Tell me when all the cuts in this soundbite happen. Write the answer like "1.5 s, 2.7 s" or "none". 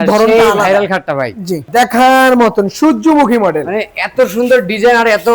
1.7 s